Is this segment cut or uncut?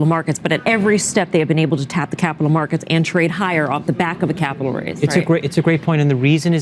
uncut